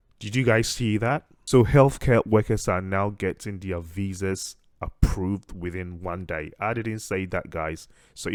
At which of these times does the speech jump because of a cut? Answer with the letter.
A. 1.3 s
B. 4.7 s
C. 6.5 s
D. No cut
D